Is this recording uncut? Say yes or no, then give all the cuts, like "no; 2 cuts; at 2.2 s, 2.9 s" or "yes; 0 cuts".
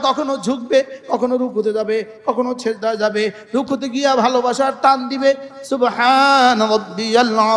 yes; 0 cuts